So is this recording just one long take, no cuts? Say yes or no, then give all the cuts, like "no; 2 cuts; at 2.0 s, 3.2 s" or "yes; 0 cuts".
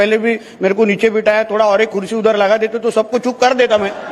yes; 0 cuts